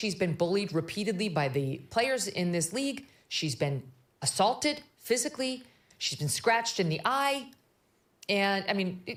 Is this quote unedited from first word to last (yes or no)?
yes